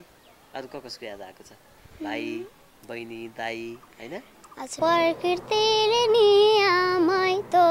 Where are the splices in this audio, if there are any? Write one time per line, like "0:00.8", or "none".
0:04.7